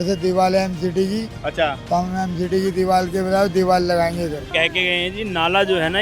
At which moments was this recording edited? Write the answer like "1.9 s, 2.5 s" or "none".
4.5 s